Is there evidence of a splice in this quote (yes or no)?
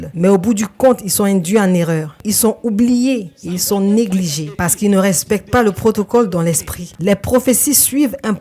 yes